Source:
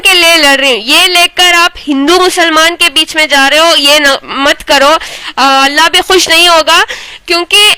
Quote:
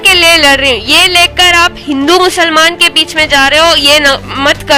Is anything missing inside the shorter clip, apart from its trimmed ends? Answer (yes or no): no